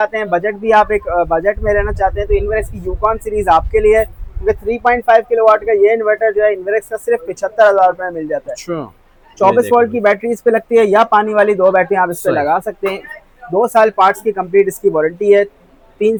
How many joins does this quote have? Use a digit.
0